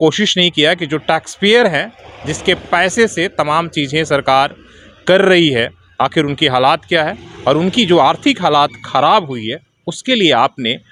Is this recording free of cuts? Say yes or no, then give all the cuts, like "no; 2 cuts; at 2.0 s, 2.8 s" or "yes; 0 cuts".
yes; 0 cuts